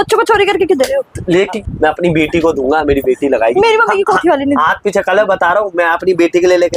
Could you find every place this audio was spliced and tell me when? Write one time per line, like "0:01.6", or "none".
0:01.6